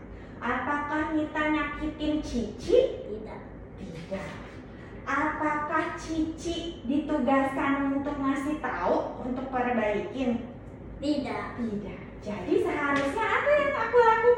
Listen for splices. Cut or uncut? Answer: uncut